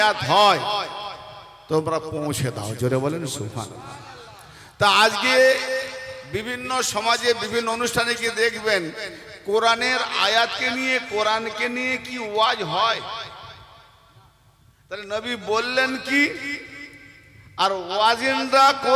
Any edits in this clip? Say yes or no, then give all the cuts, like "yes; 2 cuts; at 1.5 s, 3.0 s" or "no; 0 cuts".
no; 0 cuts